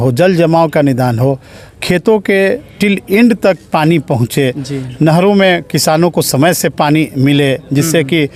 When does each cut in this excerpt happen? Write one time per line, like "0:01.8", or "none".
none